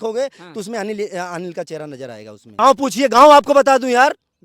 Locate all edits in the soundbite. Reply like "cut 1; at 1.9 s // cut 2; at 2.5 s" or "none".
cut 1; at 2.4 s